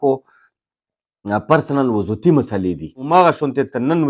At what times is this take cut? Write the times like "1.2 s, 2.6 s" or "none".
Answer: 3.0 s